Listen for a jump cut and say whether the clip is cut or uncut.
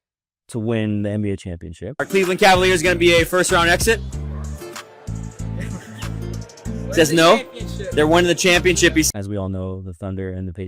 cut